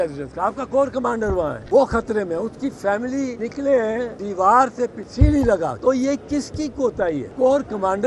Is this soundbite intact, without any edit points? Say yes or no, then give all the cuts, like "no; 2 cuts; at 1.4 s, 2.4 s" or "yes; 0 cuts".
no; 6 cuts; at 1.6 s, 3.4 s, 4.2 s, 5.0 s, 5.8 s, 7.3 s